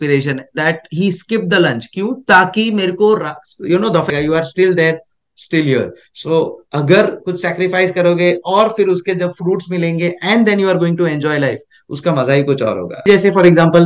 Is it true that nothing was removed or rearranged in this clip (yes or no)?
no